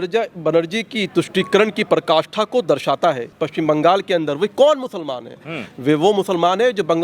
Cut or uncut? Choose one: cut